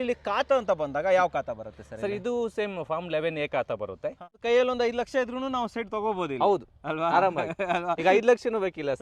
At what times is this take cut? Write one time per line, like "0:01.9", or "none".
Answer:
0:04.3